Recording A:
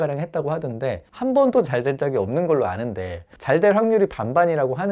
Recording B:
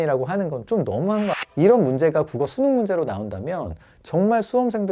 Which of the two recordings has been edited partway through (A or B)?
B